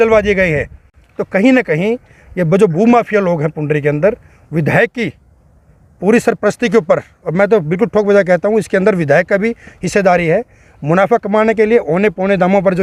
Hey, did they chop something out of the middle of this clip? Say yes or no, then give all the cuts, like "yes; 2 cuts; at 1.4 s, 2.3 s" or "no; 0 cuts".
no; 0 cuts